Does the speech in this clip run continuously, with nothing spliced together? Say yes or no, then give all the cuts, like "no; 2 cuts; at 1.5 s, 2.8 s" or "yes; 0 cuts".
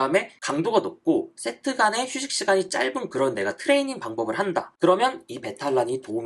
no; 1 cut; at 4.7 s